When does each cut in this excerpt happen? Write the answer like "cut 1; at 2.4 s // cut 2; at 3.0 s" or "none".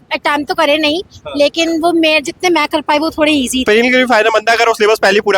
cut 1; at 3.6 s